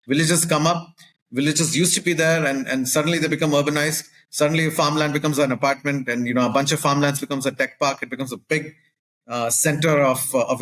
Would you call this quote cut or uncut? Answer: uncut